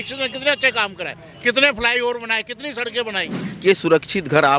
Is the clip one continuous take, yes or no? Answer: no